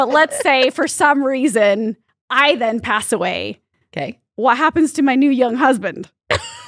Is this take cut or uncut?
uncut